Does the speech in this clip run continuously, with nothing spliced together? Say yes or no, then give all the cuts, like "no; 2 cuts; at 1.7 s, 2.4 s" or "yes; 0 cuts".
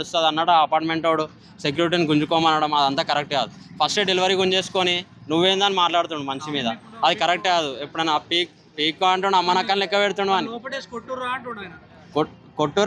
yes; 0 cuts